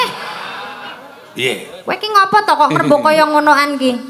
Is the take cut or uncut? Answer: uncut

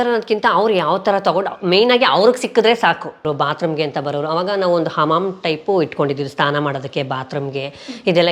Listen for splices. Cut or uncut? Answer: cut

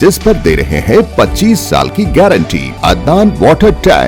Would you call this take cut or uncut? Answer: cut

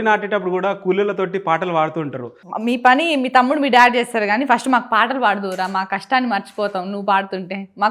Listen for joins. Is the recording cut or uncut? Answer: cut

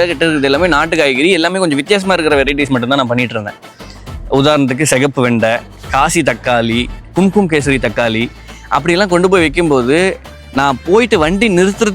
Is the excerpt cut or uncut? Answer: uncut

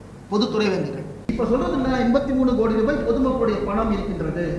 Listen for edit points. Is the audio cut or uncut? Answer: cut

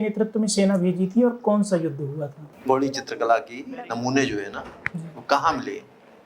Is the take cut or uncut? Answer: cut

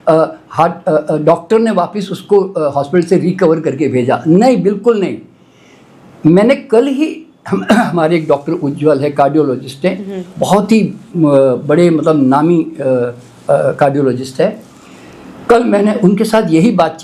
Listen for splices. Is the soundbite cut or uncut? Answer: uncut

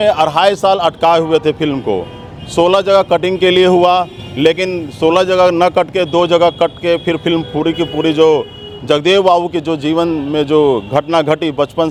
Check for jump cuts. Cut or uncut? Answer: uncut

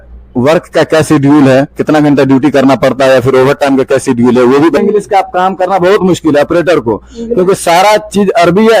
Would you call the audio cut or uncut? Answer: cut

